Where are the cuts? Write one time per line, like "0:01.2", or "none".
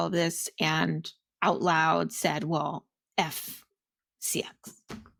none